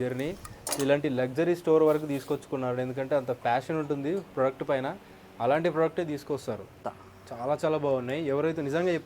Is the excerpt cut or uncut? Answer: cut